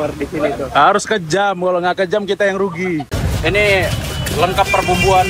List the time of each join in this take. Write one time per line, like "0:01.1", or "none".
0:03.1